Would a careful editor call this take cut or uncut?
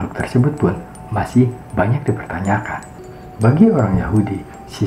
cut